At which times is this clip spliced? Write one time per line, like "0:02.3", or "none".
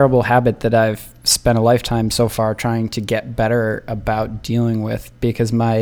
none